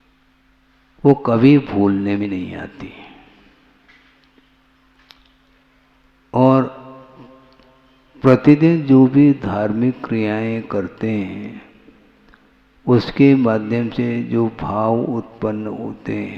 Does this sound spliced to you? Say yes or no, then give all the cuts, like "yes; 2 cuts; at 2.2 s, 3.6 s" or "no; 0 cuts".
yes; 1 cut; at 2.2 s